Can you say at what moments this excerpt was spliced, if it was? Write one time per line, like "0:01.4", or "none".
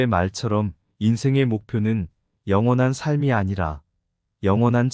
0:02.9